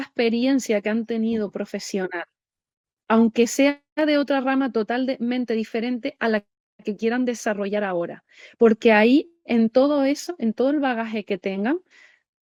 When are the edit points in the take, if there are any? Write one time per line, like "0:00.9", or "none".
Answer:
none